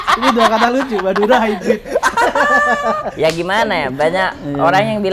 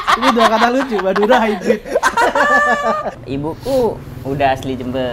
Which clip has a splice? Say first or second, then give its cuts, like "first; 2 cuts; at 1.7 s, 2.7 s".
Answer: second; 1 cut; at 3.1 s